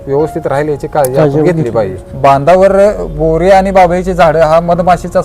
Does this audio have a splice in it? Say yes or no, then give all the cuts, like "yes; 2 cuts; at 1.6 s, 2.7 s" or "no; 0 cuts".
yes; 1 cut; at 2.0 s